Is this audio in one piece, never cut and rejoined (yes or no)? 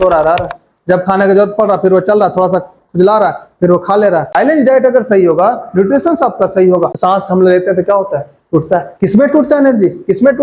no